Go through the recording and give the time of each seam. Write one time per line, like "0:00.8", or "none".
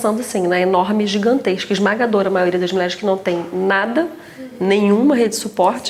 none